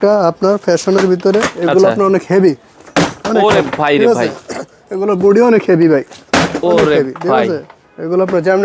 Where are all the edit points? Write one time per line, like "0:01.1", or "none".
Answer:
none

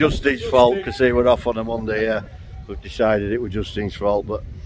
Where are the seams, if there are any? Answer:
none

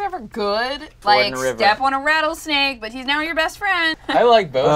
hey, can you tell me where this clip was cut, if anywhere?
0:00.9
0:03.8

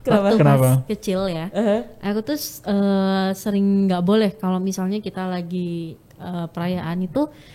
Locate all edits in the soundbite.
none

